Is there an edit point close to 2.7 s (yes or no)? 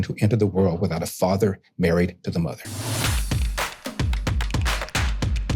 yes